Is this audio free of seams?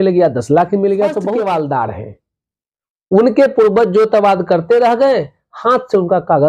no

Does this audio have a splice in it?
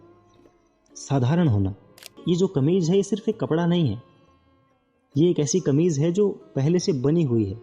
yes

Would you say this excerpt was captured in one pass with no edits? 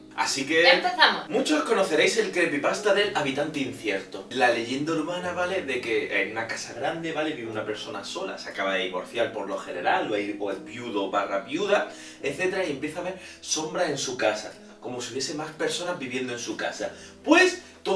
yes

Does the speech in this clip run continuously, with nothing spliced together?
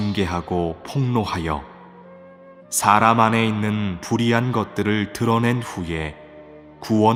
yes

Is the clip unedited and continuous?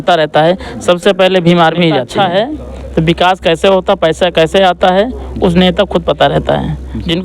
no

